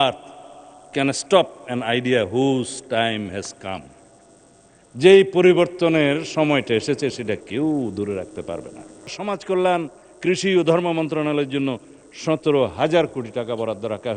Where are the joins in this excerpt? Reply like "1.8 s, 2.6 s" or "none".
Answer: 9.2 s

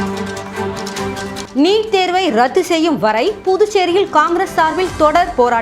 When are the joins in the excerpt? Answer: 1.4 s

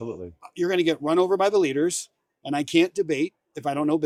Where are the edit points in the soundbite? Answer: none

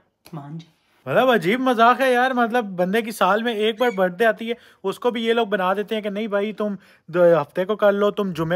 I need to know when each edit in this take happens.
1.1 s

